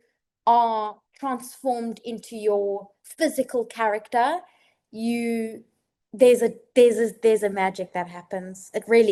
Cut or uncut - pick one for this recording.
uncut